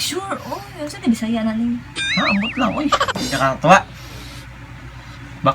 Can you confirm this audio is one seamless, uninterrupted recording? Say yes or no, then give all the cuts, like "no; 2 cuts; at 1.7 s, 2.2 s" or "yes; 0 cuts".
no; 1 cut; at 3.1 s